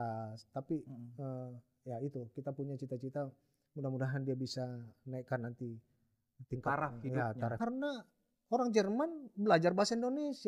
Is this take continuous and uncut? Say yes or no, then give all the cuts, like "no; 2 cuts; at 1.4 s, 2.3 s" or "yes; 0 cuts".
no; 1 cut; at 7.5 s